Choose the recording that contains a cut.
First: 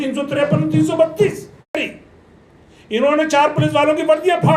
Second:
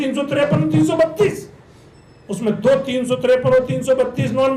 first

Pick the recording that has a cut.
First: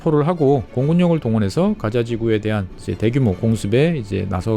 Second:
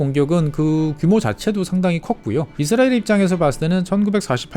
second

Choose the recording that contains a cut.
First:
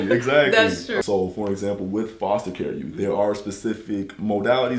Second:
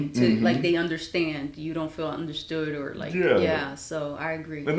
first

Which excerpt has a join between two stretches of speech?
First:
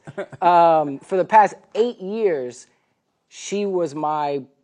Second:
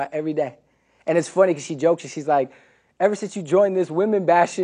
first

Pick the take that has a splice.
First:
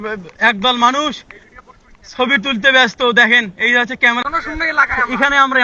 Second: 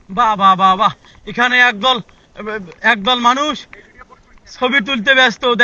first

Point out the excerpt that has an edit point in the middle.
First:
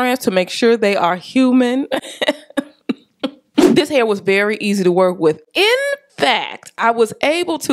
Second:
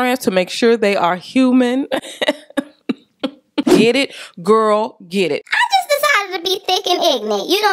second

